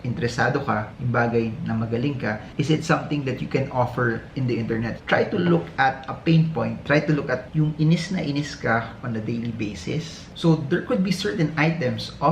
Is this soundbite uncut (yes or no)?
no